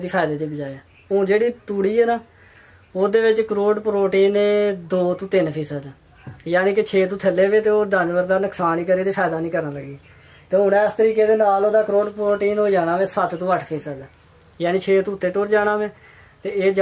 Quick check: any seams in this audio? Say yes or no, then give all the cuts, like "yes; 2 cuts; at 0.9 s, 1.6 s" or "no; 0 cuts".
no; 0 cuts